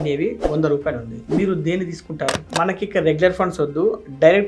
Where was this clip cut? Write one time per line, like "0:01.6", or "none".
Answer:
0:02.5